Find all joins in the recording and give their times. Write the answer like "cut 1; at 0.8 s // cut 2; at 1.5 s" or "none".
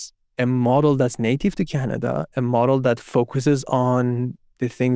none

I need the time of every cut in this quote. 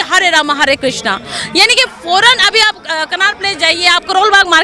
none

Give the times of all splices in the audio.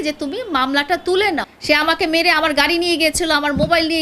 cut 1; at 1.5 s

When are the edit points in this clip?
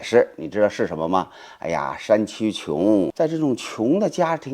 cut 1; at 3.1 s

